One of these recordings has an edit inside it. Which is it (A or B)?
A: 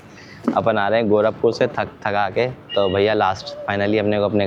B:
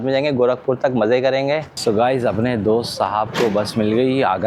B